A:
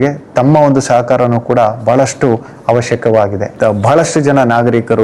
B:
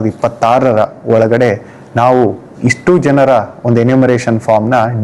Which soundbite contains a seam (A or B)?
A